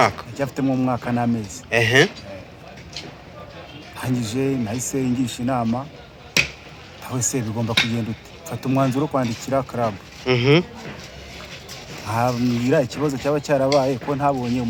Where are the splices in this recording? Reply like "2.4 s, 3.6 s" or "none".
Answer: none